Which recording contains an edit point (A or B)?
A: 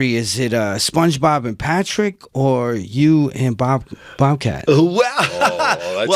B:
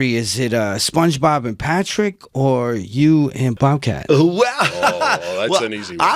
B